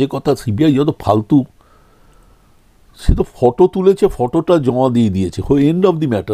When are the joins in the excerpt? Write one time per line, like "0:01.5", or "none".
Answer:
none